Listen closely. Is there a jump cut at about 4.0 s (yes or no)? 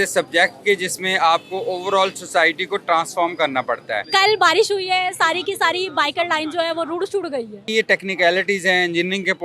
yes